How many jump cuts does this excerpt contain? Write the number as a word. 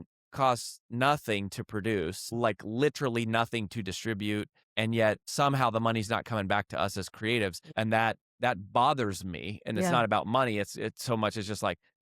five